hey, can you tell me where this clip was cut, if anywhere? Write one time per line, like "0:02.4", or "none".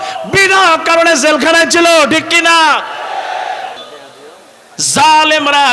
0:03.7